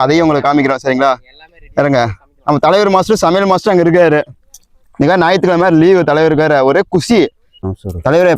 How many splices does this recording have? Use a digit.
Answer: 1